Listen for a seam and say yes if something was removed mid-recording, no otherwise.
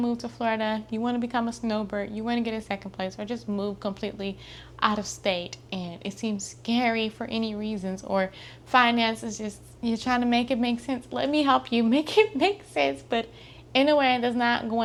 no